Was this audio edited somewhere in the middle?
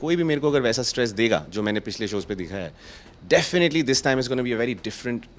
no; 0 cuts

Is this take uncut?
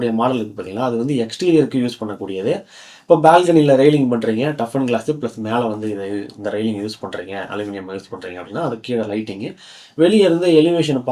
yes; 0 cuts

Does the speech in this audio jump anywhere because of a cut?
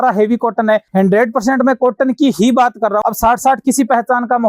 yes; 2 cuts; at 0.9 s, 3.0 s

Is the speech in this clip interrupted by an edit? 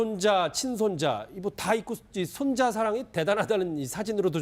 no; 0 cuts

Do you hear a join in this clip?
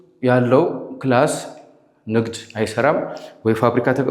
no; 0 cuts

